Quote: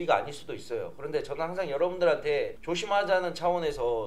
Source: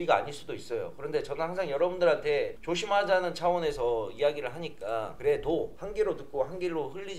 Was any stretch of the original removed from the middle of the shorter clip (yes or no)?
no